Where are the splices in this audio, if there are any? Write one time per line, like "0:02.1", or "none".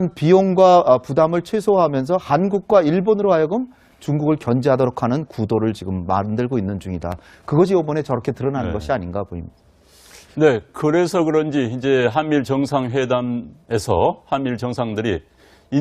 0:05.1